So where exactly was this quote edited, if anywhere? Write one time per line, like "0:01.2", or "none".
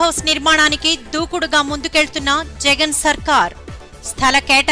none